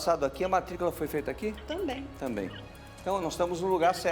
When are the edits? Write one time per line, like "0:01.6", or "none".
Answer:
none